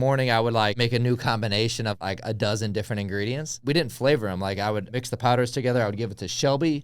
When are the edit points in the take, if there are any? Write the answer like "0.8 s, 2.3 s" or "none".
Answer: 0.8 s, 2.0 s, 3.6 s, 4.9 s